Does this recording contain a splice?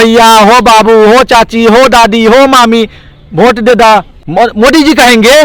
yes; 1 cut; at 4.2 s

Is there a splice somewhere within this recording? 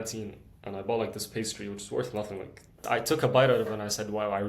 yes; 1 cut; at 2.8 s

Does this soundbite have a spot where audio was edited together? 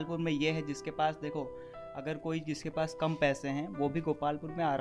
no; 0 cuts

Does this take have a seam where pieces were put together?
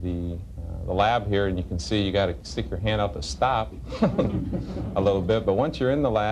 no; 0 cuts

